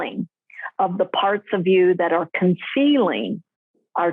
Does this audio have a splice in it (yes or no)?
no